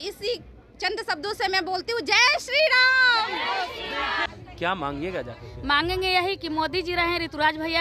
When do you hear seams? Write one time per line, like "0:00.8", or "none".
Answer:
0:04.2